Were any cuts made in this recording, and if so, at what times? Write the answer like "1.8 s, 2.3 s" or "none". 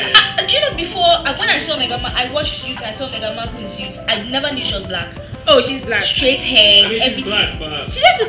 none